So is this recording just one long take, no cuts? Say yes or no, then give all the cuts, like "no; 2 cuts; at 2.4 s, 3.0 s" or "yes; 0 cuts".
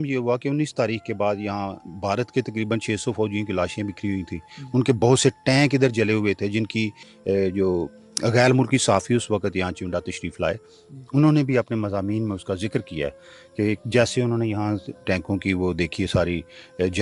yes; 0 cuts